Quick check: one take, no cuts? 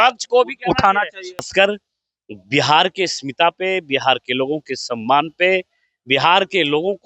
no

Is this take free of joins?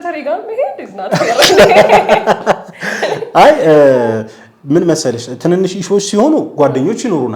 yes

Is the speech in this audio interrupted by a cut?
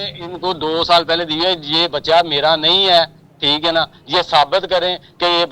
no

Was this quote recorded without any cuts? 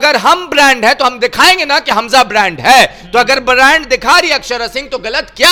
yes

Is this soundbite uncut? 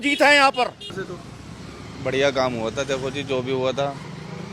no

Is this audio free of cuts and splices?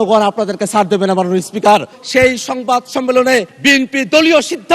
no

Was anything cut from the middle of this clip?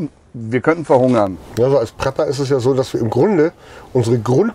yes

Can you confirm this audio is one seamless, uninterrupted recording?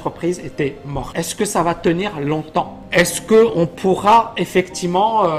no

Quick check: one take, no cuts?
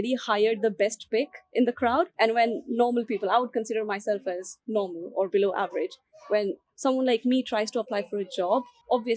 yes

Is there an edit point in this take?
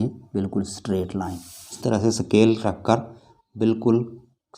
yes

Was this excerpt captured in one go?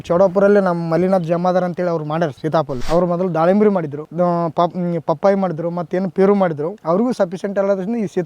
no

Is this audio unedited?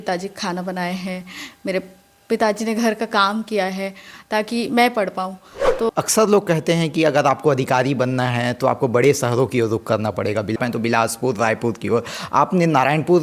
no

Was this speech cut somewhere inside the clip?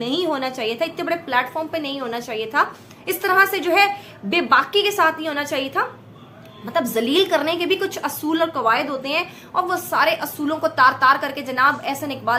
no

